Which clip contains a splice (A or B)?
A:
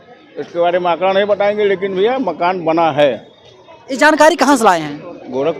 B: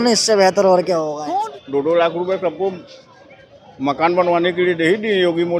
B